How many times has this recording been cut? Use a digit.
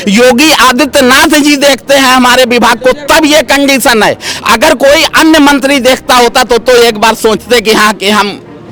0